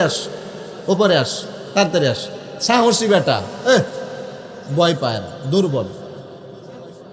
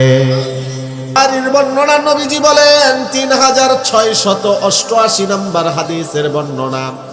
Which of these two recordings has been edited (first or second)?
second